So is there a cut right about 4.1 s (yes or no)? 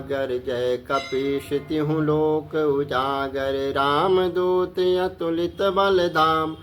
no